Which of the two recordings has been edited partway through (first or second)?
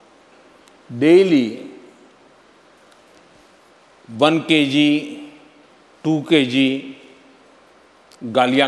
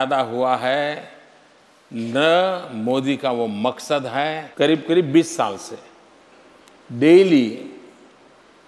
second